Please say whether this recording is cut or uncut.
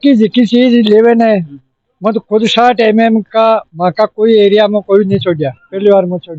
uncut